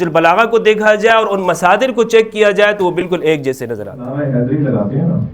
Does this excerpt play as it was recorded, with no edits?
no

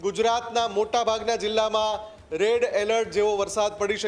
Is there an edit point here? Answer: no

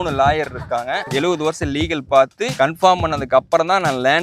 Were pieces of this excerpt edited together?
yes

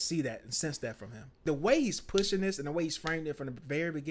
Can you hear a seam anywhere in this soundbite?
yes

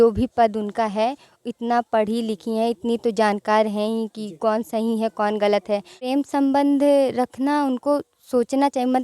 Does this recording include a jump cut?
yes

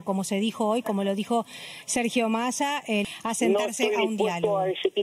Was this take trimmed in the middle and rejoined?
yes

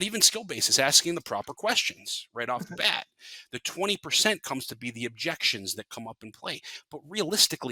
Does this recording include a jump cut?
no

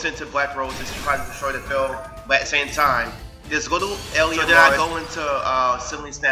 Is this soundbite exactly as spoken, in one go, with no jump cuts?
no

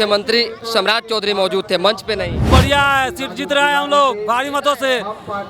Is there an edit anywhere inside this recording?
yes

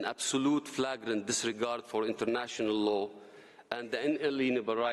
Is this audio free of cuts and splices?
yes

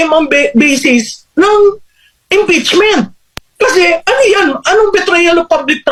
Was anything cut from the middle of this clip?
no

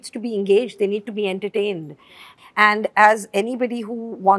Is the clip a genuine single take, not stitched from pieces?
yes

